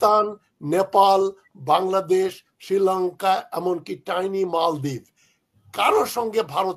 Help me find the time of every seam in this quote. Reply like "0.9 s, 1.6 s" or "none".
none